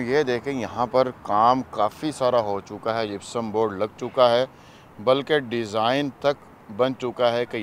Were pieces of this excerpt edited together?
no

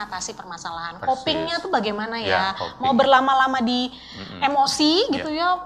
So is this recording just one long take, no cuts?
yes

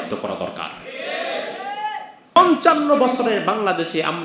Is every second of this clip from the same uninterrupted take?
no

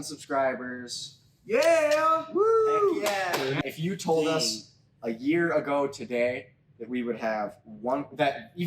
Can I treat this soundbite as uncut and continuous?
no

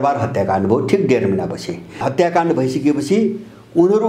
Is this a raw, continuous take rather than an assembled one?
no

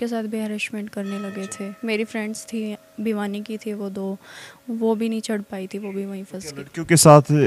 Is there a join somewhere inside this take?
no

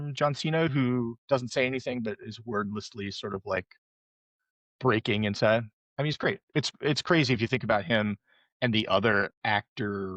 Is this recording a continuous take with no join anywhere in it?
no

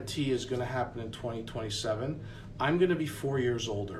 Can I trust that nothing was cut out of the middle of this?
yes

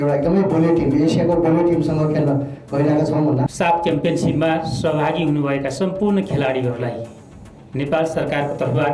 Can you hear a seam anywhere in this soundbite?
yes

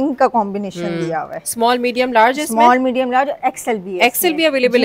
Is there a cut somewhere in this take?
no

